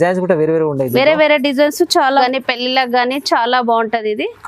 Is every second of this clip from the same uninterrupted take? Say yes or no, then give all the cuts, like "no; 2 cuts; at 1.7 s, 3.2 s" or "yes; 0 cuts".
no; 1 cut; at 2.2 s